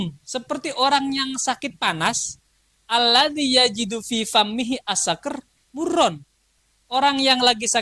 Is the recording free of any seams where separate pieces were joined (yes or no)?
yes